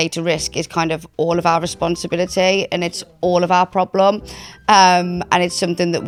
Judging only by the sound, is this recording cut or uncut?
uncut